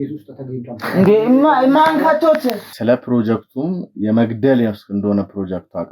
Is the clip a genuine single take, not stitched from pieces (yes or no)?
no